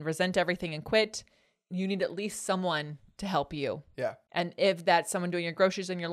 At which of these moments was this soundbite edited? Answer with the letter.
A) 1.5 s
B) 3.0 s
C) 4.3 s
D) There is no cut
A